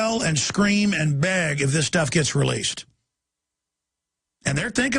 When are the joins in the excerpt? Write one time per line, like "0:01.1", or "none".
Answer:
0:02.7